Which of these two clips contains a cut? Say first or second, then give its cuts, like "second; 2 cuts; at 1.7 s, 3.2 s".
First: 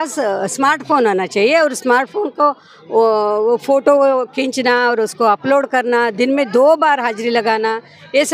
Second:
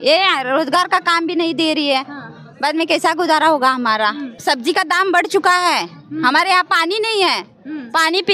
second; 1 cut; at 4.3 s